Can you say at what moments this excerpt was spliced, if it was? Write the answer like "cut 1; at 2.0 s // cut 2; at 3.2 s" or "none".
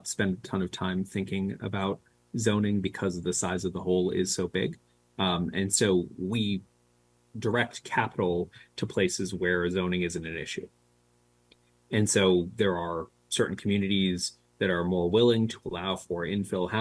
none